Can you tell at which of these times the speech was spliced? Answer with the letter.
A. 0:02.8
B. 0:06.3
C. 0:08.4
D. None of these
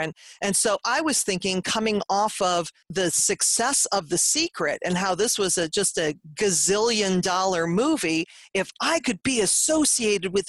A